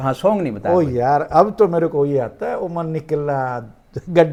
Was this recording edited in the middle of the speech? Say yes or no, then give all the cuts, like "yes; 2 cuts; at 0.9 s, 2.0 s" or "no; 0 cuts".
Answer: no; 0 cuts